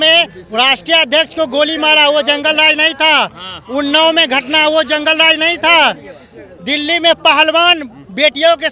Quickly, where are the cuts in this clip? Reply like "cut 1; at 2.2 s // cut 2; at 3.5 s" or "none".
none